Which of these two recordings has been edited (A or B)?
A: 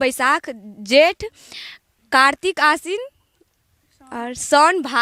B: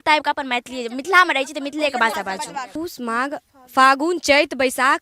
B